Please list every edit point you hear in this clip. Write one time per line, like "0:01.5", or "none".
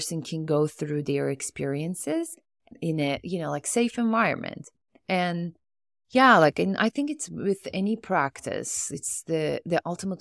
0:02.7

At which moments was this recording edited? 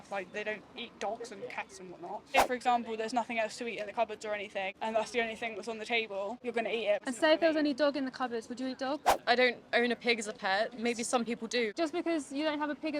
0:02.4
0:04.7
0:06.9
0:09.1
0:11.7

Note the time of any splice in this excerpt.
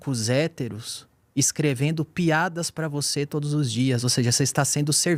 none

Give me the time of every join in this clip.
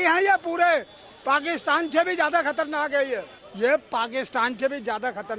0:03.4

